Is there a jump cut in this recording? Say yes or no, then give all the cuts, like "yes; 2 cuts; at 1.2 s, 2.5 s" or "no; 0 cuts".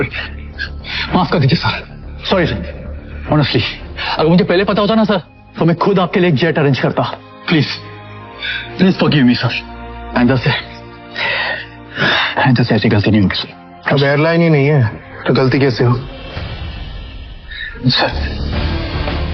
no; 0 cuts